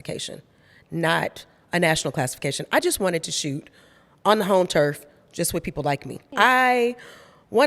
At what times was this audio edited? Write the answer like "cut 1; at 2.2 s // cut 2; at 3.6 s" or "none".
cut 1; at 6.2 s